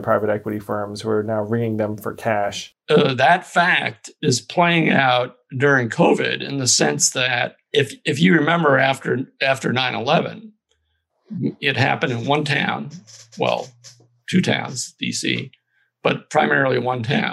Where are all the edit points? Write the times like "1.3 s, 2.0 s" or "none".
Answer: 2.7 s